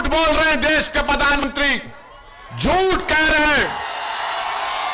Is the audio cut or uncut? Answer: cut